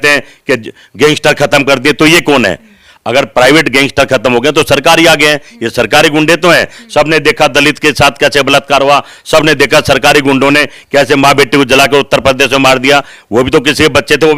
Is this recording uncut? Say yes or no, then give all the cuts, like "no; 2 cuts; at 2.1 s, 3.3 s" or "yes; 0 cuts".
yes; 0 cuts